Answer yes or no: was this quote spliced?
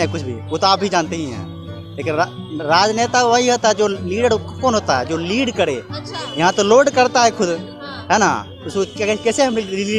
no